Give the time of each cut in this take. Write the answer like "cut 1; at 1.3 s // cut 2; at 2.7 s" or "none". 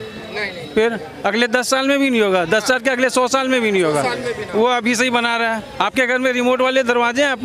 cut 1; at 5.7 s